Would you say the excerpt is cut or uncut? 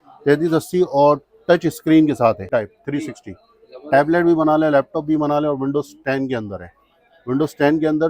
cut